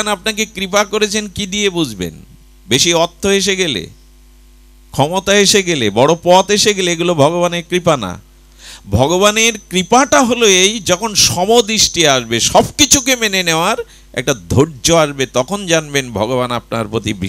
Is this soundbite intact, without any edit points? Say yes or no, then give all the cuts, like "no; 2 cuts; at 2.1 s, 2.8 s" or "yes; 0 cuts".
yes; 0 cuts